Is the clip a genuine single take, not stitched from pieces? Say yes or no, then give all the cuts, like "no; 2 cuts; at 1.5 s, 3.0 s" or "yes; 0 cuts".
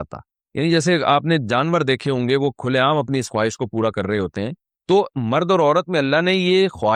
yes; 0 cuts